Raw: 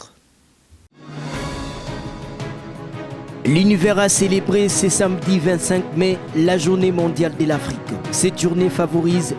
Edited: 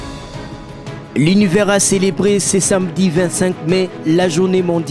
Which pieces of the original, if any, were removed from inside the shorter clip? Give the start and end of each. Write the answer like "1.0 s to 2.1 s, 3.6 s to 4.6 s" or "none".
2.6 s to 3.4 s